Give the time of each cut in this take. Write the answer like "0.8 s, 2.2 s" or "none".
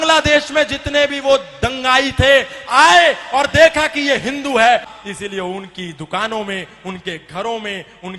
4.9 s